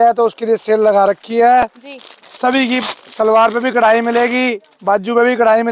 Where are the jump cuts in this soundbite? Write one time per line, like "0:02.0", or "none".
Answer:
none